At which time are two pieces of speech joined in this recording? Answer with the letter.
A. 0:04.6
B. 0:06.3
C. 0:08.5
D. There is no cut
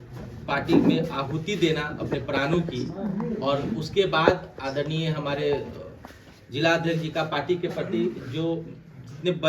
D